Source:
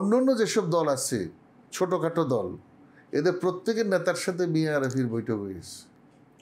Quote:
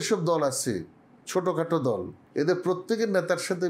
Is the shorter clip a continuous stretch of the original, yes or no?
no